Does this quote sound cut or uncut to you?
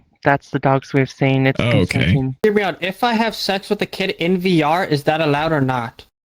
cut